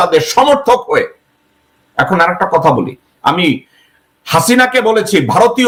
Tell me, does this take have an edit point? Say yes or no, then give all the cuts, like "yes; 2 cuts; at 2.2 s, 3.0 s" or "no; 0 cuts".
no; 0 cuts